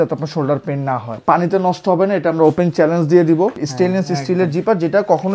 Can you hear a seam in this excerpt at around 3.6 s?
yes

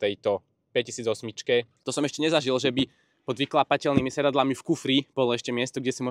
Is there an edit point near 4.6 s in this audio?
no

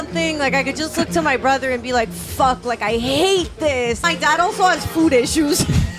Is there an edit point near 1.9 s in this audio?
no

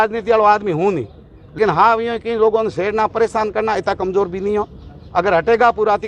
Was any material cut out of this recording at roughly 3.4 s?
no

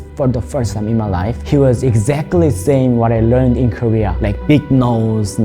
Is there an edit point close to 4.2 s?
no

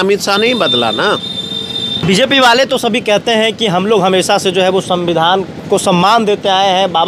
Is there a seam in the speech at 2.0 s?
yes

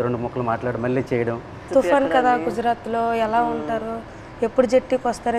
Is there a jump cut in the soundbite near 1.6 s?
yes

